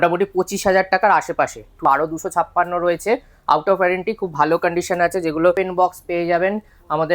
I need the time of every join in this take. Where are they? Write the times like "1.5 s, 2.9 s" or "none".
1.8 s, 5.5 s